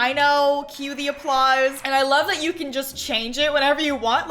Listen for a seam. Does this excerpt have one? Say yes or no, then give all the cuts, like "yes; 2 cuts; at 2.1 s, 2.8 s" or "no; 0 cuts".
yes; 1 cut; at 1.8 s